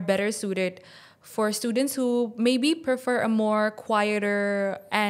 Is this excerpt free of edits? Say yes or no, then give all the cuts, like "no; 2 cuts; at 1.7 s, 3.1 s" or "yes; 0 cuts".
yes; 0 cuts